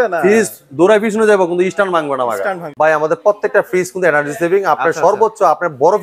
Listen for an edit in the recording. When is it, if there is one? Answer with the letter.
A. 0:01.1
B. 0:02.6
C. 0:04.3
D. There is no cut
B